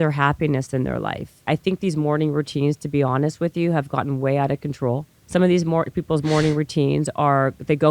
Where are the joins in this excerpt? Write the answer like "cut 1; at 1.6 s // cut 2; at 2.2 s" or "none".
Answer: cut 1; at 1.4 s // cut 2; at 5.1 s